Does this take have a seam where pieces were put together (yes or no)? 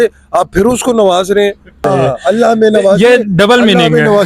yes